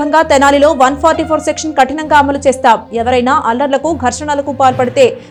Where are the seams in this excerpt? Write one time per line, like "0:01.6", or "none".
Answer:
none